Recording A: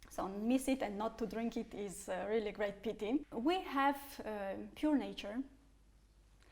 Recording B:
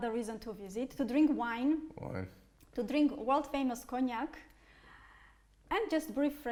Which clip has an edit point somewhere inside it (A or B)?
A